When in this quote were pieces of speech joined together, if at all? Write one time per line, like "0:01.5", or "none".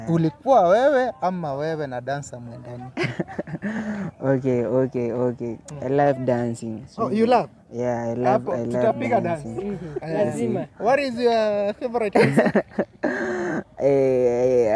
none